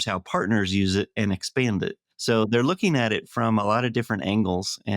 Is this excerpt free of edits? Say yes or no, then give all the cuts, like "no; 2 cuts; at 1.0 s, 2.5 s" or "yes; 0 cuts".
no; 1 cut; at 2.1 s